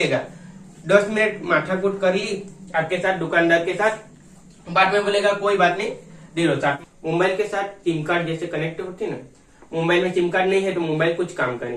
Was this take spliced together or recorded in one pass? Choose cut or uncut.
cut